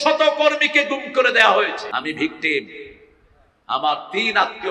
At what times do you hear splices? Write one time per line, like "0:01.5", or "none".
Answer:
0:01.9